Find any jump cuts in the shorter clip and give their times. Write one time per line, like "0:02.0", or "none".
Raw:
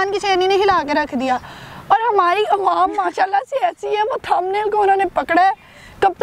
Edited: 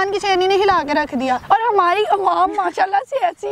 0:01.4